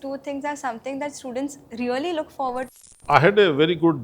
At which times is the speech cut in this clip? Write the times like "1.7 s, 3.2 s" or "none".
2.7 s